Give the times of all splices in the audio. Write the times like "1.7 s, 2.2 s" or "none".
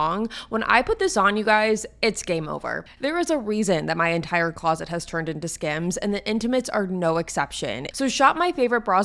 2.8 s, 7.8 s